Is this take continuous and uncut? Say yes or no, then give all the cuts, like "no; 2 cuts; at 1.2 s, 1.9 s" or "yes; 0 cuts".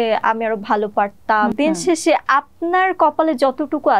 no; 1 cut; at 1.5 s